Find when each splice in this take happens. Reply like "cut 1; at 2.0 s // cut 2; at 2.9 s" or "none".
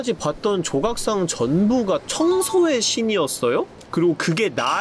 none